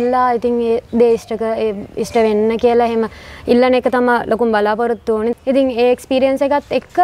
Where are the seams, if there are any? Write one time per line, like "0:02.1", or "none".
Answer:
0:05.3

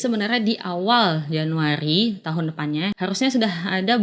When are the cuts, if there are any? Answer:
0:03.0

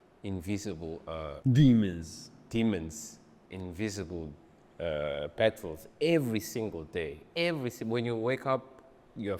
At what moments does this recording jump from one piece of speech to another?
0:01.4

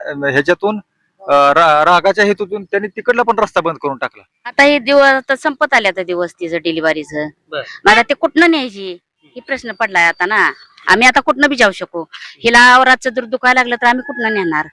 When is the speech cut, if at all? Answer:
0:04.6

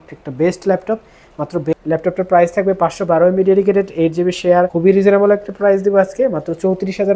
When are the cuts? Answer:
0:01.7

